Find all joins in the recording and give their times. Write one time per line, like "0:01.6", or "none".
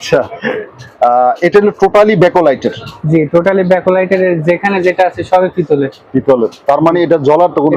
none